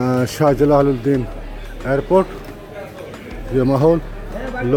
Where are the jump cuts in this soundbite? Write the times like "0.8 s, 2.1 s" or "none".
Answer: none

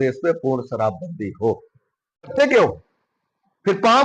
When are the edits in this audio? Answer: 2.2 s

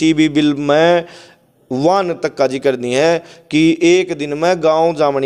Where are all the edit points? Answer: none

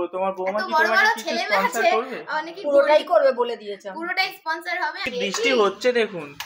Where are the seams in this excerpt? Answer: 5.0 s

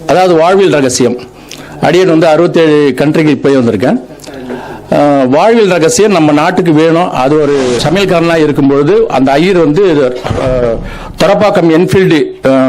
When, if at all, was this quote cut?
7.8 s

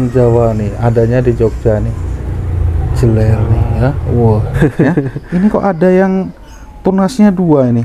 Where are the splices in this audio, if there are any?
4.5 s

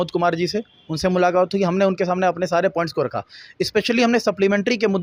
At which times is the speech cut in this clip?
none

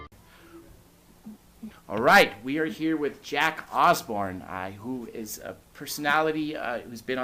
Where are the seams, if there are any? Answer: 1.7 s

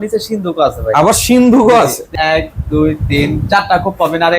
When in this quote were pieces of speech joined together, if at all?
2.0 s

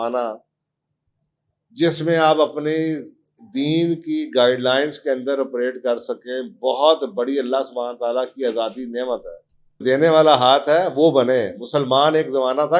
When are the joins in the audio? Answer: 9.8 s

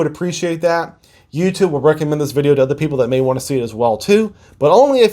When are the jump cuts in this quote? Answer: none

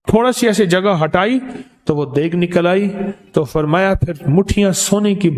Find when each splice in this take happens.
none

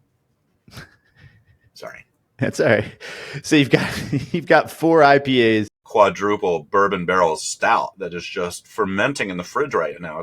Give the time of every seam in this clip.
5.8 s

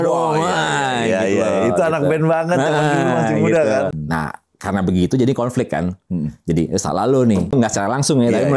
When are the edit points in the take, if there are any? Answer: 3.9 s, 7.5 s

